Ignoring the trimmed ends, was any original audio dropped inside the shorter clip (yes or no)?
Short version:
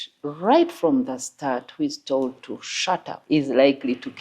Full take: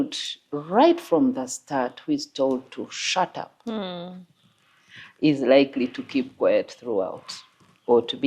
yes